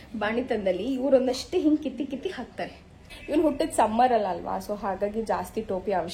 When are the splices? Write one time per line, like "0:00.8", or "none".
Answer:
0:03.1